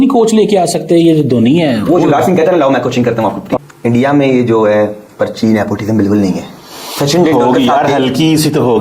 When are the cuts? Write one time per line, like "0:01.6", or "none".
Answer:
none